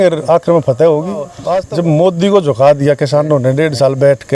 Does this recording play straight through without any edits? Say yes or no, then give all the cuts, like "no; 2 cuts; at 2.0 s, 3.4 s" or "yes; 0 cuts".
no; 1 cut; at 1.4 s